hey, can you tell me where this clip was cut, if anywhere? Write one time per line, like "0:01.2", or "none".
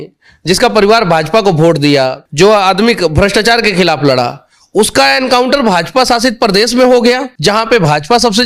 0:02.2
0:07.3